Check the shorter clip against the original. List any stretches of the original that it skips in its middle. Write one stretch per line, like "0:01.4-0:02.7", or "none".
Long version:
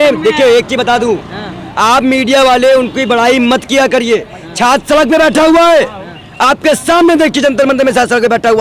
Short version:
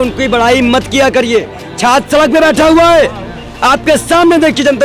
none